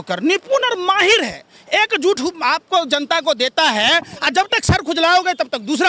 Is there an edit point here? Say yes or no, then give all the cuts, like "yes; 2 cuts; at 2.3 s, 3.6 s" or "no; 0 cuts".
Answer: no; 0 cuts